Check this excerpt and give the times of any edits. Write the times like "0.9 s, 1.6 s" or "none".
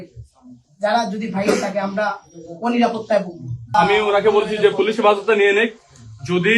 3.7 s